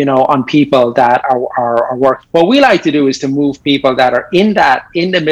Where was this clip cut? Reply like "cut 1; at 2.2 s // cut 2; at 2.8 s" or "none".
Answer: cut 1; at 2.2 s